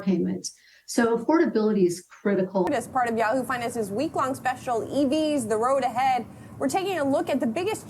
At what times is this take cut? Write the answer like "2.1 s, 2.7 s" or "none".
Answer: 2.7 s